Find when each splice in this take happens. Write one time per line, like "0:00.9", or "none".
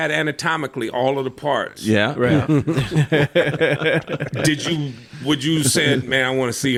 none